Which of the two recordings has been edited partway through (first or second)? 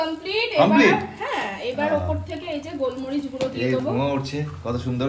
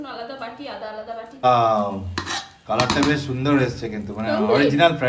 second